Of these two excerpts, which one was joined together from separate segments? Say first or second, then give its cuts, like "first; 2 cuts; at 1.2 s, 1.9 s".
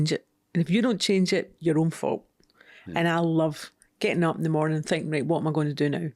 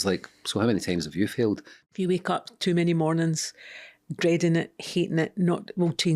second; 1 cut; at 1.8 s